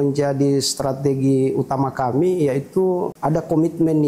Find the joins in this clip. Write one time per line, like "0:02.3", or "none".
0:03.1